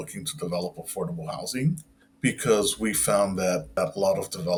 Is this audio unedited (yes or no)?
yes